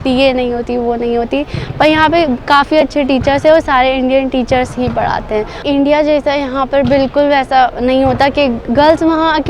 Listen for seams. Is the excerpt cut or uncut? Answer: cut